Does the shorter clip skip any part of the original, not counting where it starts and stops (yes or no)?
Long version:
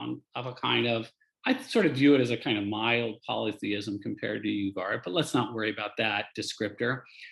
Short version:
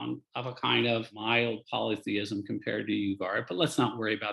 yes